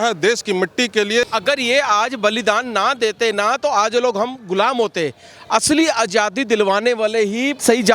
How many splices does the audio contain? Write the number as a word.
one